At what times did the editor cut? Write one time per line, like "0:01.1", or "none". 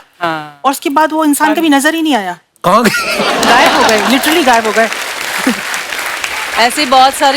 none